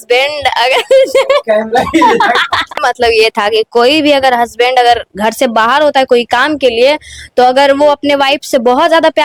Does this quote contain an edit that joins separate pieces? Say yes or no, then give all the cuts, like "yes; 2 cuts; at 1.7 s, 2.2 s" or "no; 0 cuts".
no; 0 cuts